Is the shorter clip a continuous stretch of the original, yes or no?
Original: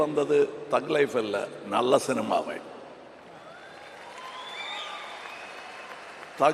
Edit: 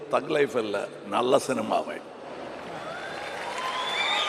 yes